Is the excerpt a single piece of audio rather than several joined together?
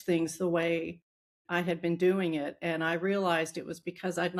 yes; 0 cuts

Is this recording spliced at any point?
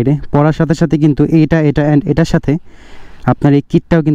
no; 0 cuts

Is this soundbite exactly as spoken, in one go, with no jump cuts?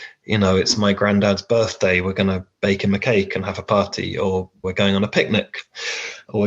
yes; 0 cuts

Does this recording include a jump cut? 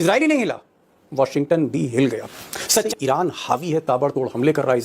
yes; 1 cut; at 2.9 s

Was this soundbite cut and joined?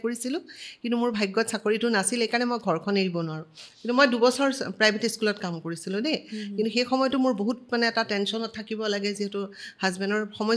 no; 0 cuts

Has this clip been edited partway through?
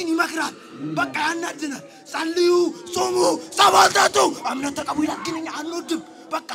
no; 0 cuts

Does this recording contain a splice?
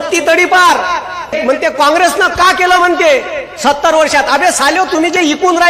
yes; 1 cut; at 1.3 s

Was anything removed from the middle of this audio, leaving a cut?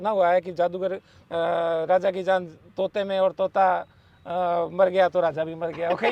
no; 0 cuts

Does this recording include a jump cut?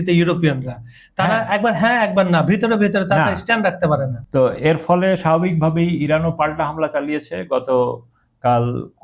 yes; 1 cut; at 4.2 s

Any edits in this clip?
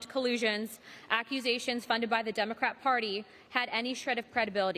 no; 0 cuts

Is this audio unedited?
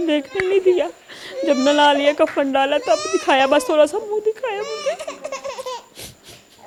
yes; 0 cuts

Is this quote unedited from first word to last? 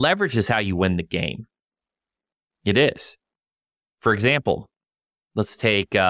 yes; 0 cuts

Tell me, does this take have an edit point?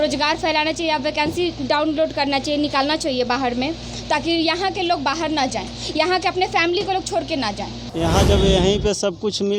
yes; 1 cut; at 7.8 s

